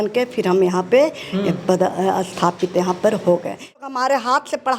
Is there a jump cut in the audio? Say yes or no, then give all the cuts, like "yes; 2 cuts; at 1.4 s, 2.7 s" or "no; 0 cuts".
yes; 1 cut; at 3.8 s